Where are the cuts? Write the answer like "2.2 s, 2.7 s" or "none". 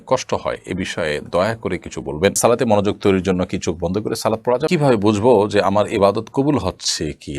2.4 s, 4.7 s